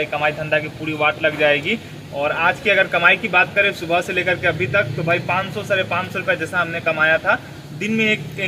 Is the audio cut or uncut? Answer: uncut